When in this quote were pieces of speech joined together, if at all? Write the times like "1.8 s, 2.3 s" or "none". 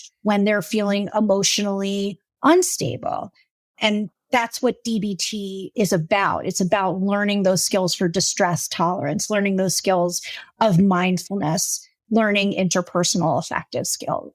5.7 s